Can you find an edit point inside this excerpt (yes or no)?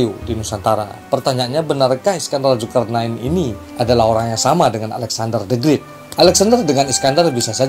yes